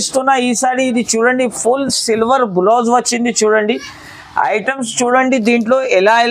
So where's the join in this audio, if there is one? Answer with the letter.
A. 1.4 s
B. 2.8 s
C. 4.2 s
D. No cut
D